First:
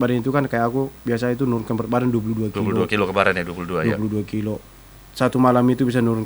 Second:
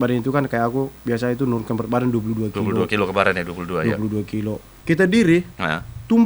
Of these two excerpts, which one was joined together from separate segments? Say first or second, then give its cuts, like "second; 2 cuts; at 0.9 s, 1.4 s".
second; 1 cut; at 4.7 s